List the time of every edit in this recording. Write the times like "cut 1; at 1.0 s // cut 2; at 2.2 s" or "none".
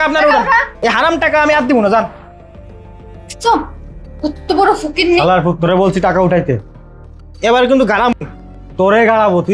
none